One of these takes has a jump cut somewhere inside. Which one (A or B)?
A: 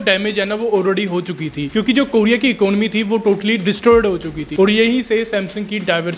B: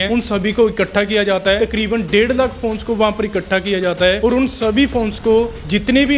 A